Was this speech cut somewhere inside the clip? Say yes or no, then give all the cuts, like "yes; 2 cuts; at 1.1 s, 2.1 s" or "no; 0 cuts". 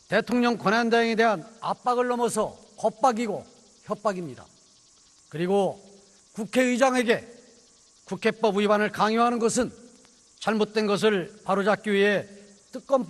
yes; 1 cut; at 10.6 s